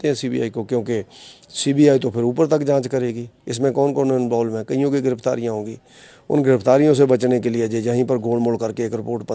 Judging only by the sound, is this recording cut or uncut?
uncut